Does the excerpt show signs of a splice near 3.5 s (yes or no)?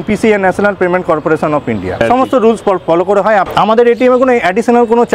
yes